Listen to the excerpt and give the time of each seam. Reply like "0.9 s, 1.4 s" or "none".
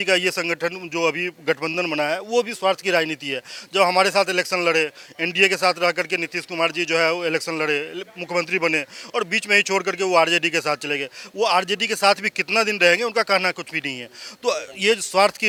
none